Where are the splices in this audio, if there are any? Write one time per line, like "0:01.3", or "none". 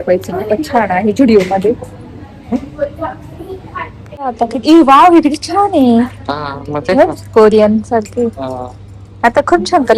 none